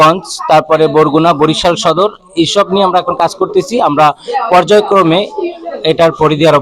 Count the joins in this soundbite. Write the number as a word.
zero